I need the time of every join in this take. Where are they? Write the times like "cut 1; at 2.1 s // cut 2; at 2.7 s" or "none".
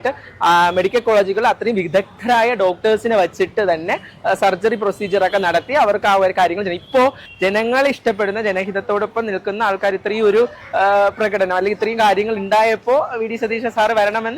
cut 1; at 7.2 s